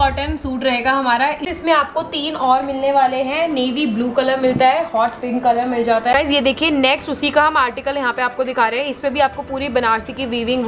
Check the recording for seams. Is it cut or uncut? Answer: cut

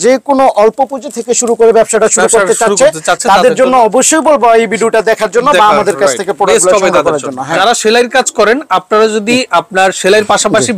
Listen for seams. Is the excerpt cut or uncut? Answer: cut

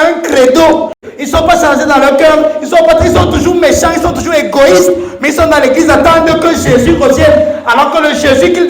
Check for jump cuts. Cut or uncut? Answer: cut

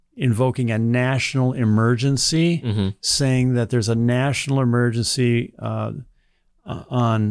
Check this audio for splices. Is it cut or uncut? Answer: uncut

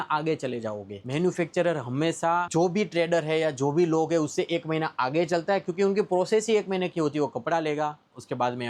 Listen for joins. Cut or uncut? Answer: uncut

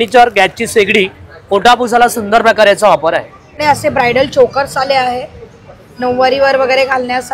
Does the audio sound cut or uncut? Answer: cut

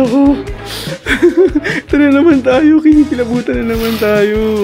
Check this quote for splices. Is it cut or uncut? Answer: uncut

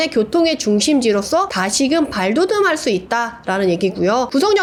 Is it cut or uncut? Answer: uncut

